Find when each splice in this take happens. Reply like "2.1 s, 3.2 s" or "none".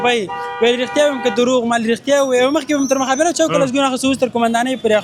none